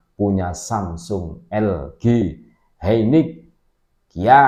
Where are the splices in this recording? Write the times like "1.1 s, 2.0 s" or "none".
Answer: none